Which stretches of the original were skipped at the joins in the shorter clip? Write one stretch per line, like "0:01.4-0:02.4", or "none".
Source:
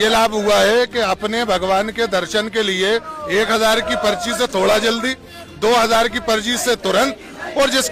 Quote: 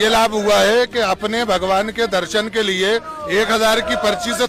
none